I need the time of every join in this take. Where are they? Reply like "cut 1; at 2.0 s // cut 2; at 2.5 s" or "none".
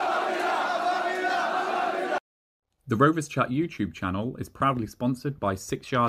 cut 1; at 2.2 s